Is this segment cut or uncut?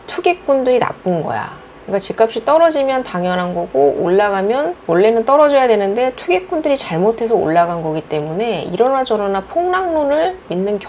uncut